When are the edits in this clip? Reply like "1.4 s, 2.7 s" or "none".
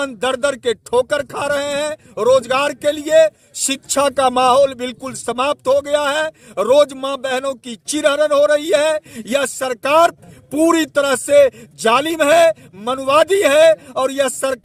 none